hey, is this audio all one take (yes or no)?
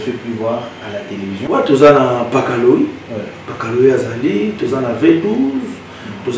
no